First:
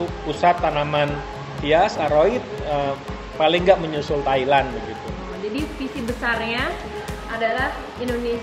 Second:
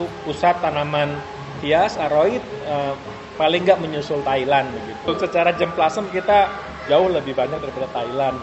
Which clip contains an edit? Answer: second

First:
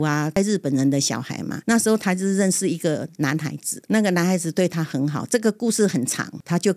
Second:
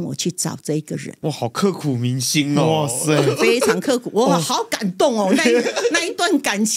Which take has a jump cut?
second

